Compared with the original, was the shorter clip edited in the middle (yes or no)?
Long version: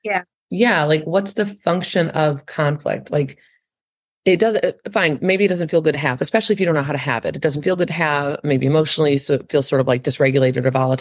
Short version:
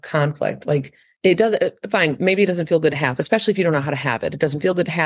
yes